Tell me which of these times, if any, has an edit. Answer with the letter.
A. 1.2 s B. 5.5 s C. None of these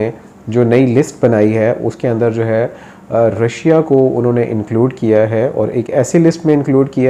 C